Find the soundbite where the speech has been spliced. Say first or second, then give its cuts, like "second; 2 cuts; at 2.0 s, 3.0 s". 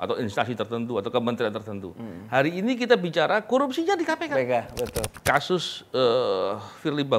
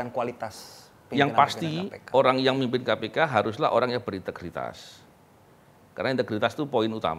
first; 1 cut; at 5.1 s